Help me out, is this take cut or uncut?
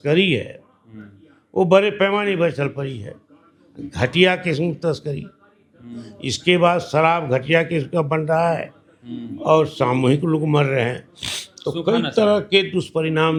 uncut